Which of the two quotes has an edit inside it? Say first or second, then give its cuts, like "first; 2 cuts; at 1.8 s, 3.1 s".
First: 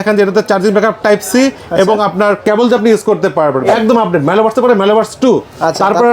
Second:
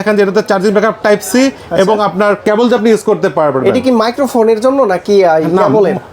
first; 1 cut; at 3.7 s